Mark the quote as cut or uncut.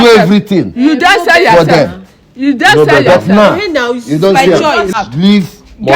cut